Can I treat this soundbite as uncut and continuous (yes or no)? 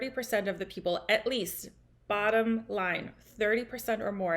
yes